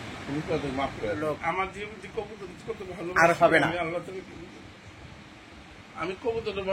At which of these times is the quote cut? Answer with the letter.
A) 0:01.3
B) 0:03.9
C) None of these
A